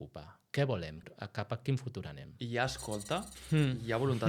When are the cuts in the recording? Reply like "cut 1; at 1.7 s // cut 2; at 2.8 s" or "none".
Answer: cut 1; at 1.0 s // cut 2; at 3.3 s